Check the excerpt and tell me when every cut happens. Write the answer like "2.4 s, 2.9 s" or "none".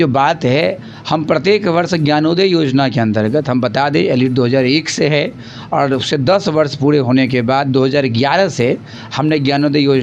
none

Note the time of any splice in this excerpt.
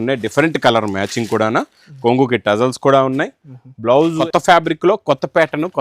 4.2 s

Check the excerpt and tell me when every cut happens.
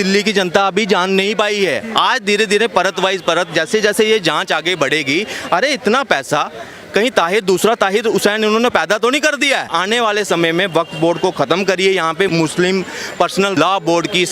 9.6 s, 12.3 s, 13.6 s

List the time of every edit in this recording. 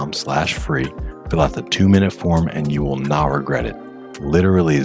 none

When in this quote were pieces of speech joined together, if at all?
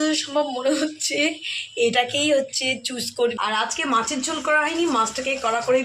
3.4 s

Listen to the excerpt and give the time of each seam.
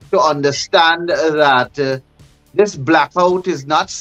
none

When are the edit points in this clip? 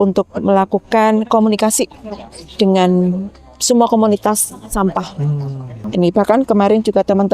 5.7 s

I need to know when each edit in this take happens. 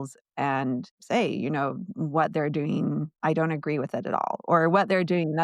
0.9 s

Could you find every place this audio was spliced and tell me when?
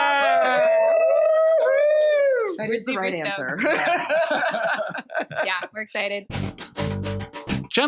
6.3 s

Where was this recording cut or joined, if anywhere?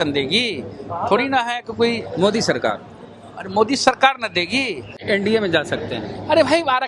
5.0 s

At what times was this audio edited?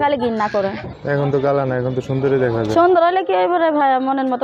1.0 s

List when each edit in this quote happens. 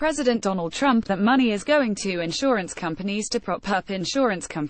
none

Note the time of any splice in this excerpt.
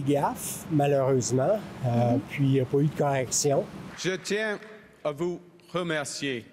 3.8 s

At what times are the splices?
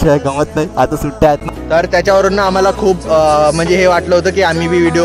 1.5 s

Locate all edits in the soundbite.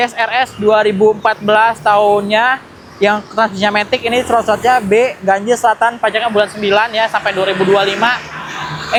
none

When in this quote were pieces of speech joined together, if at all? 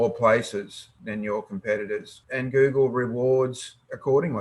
2.1 s

